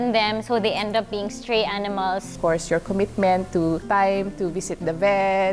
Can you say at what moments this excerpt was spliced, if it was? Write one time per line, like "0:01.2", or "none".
0:02.3
0:03.8